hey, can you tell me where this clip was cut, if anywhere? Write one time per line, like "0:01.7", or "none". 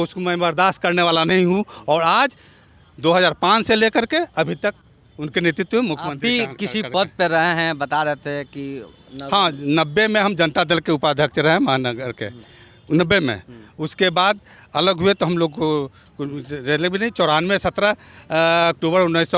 none